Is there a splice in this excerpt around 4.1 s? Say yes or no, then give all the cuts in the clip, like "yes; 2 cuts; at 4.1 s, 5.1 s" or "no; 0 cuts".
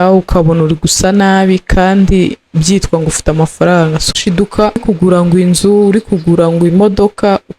yes; 1 cut; at 4.1 s